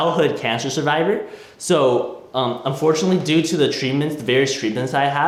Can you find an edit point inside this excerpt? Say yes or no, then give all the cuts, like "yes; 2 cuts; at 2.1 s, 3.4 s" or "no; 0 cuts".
no; 0 cuts